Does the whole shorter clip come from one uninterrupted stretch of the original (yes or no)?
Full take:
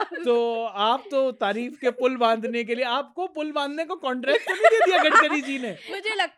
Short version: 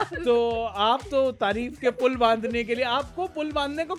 yes